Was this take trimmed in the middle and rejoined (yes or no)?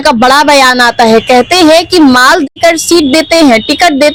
no